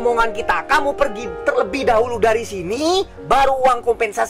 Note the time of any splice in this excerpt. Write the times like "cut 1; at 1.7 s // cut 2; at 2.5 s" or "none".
none